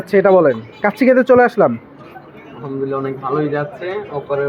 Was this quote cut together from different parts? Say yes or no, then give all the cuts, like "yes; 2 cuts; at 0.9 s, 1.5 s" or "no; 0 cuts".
no; 0 cuts